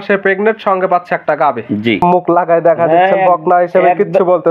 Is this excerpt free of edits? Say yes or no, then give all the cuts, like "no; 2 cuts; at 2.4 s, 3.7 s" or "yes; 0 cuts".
no; 1 cut; at 2.0 s